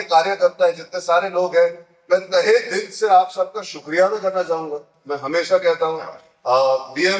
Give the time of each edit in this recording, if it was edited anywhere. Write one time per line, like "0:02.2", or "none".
none